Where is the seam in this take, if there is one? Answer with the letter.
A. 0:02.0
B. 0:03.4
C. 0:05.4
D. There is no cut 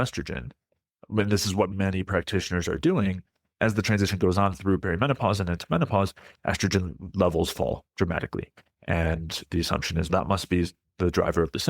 B